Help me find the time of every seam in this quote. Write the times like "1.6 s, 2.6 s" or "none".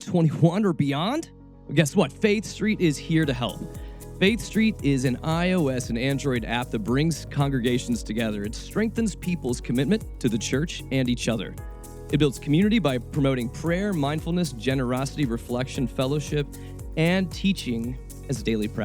none